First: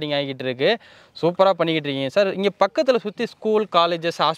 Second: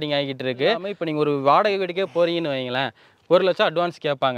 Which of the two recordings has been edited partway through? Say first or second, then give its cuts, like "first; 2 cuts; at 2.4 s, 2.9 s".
second; 1 cut; at 1.0 s